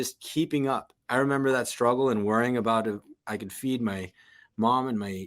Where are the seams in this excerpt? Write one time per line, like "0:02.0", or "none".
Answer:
0:00.9